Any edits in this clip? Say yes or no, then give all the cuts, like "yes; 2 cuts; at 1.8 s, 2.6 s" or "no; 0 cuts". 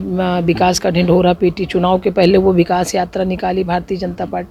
no; 0 cuts